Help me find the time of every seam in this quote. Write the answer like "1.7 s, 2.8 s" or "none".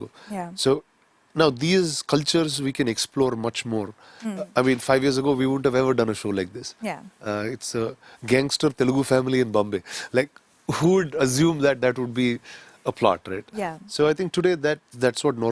none